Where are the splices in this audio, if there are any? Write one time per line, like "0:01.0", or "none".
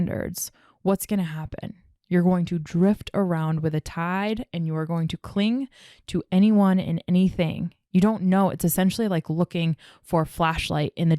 none